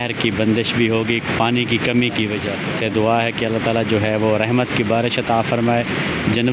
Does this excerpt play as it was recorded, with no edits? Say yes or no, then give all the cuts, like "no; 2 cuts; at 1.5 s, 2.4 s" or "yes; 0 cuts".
yes; 0 cuts